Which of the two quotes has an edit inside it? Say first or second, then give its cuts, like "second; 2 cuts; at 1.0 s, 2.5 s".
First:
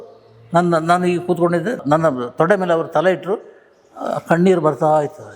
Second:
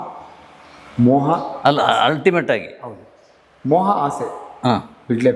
first; 1 cut; at 1.8 s